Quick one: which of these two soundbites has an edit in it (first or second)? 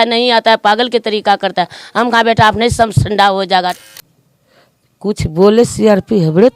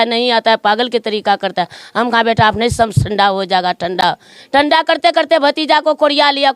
first